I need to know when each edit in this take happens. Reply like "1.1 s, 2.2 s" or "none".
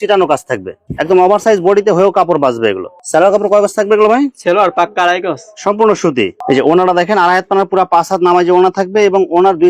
none